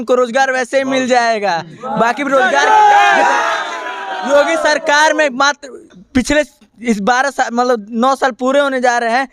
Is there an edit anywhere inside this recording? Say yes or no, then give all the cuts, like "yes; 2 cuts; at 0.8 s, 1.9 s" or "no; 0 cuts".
no; 0 cuts